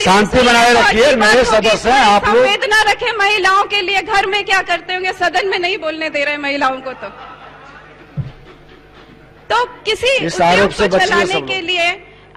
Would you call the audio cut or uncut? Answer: uncut